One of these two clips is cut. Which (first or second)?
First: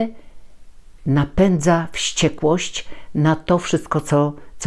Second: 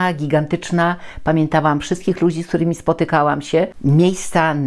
second